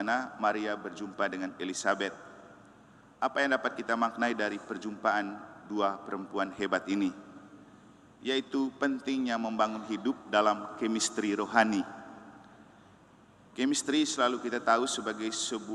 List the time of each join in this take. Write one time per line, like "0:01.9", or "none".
none